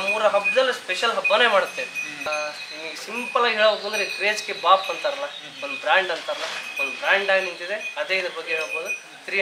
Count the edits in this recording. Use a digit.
1